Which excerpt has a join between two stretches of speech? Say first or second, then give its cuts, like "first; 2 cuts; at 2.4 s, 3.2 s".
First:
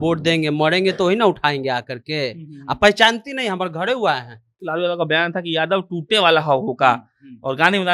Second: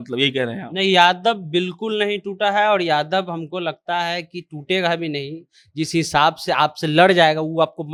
first; 1 cut; at 4.6 s